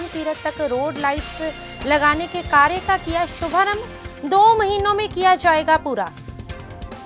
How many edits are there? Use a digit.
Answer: 1